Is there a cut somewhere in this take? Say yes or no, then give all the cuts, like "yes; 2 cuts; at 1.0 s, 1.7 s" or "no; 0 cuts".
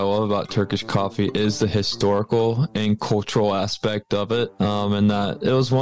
yes; 1 cut; at 4.5 s